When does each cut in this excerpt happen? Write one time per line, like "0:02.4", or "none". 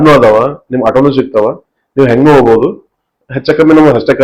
none